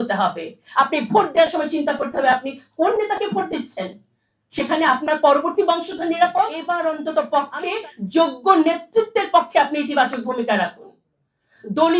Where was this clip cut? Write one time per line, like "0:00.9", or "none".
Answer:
0:06.6